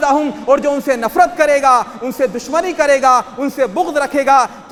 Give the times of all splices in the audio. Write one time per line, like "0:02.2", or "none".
none